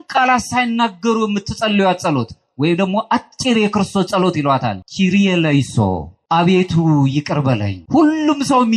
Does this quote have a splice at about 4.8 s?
yes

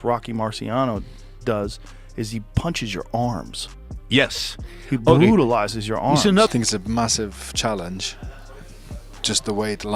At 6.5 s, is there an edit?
yes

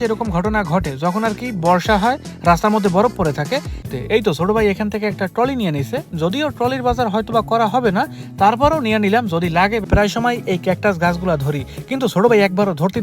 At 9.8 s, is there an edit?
yes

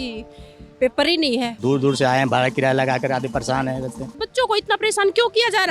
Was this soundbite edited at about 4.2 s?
yes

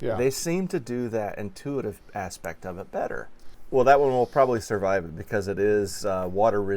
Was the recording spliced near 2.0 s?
no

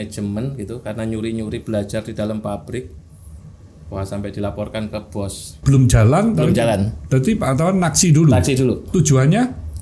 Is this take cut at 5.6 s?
yes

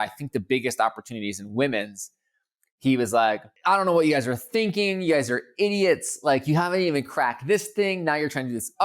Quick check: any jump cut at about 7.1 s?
no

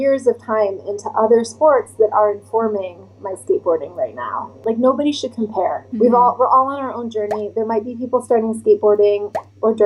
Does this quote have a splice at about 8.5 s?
no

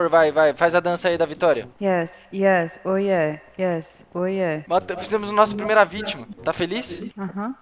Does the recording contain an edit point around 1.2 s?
no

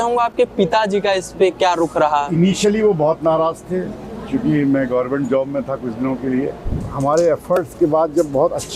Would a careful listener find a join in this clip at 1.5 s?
no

